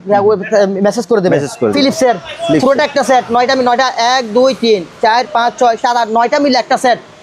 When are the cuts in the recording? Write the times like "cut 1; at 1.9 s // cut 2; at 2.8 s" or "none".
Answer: cut 1; at 1.7 s

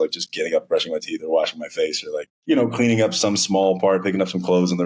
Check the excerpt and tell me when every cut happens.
cut 1; at 2.3 s

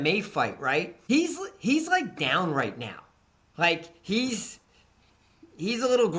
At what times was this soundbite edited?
cut 1; at 0.9 s

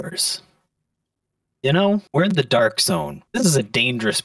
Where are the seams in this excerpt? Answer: cut 1; at 2.1 s // cut 2; at 3.2 s

